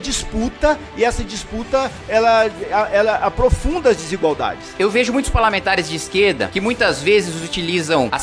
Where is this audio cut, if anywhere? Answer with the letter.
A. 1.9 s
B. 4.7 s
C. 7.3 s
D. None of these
B